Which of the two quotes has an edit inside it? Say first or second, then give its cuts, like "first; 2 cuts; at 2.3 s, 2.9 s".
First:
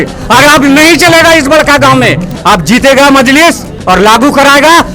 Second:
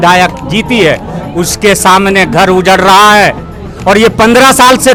first; 1 cut; at 2.3 s